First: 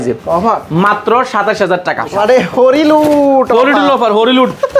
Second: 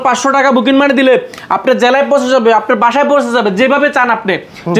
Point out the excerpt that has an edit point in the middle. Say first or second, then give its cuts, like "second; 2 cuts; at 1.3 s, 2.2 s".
first; 1 cut; at 2.1 s